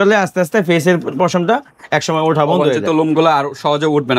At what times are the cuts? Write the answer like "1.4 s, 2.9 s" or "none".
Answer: none